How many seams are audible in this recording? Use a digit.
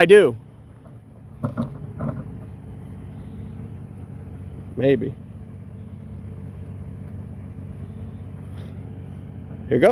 0